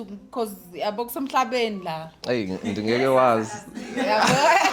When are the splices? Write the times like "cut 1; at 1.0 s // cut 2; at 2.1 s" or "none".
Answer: none